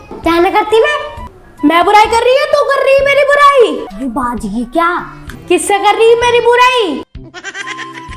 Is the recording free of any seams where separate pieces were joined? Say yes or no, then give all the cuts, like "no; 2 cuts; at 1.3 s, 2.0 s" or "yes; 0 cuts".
no; 2 cuts; at 1.2 s, 3.8 s